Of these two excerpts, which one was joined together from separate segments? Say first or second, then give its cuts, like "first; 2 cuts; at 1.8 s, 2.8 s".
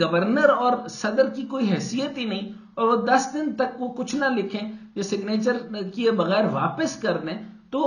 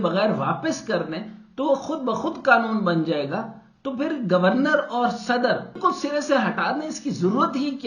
second; 1 cut; at 5.8 s